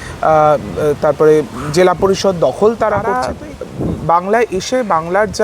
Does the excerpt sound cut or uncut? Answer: cut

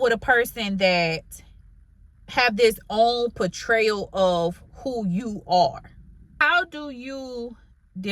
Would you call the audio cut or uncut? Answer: cut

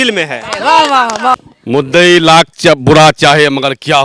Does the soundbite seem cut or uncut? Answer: cut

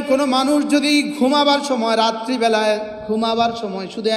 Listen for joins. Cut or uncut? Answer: uncut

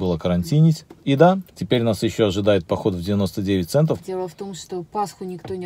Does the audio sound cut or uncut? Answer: cut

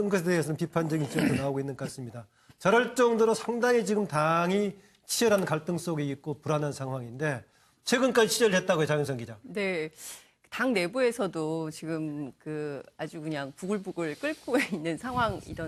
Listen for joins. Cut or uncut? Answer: uncut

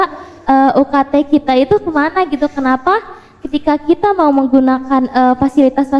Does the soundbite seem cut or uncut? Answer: uncut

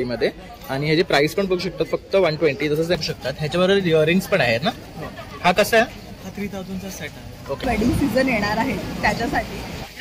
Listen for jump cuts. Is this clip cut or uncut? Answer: cut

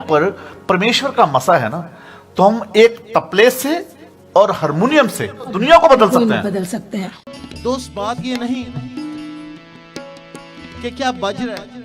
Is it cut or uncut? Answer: cut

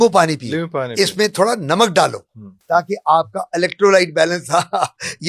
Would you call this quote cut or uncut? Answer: uncut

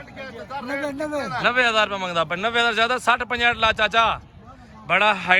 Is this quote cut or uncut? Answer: uncut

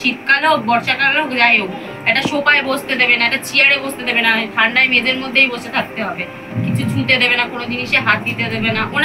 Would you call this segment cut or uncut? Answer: uncut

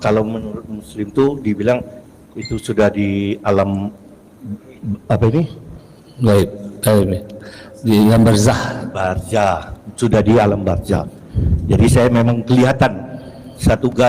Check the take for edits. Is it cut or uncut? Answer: uncut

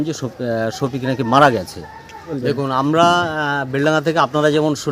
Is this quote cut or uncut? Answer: cut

